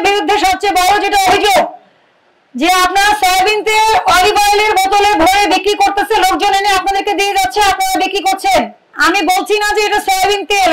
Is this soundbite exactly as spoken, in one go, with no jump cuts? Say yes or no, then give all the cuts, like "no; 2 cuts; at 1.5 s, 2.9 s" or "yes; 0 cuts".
no; 1 cut; at 8.8 s